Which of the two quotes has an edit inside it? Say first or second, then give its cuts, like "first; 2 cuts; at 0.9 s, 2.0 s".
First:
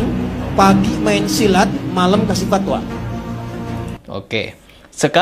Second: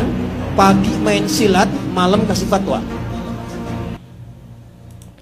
first; 1 cut; at 4.0 s